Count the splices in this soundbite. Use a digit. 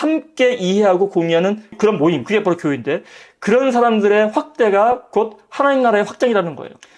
1